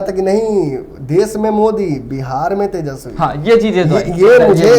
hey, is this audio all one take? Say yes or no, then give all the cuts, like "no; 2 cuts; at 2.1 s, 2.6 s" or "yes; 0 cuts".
yes; 0 cuts